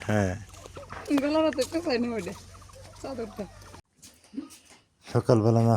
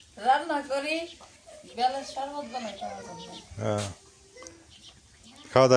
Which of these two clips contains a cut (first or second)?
first